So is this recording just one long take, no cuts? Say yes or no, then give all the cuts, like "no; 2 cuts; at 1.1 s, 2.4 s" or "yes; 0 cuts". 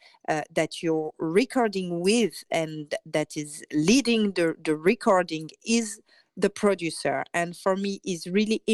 yes; 0 cuts